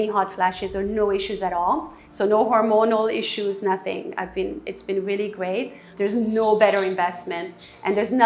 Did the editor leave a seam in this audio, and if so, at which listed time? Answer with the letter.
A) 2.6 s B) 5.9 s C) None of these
B